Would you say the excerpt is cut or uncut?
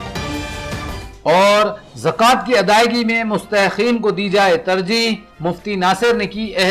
uncut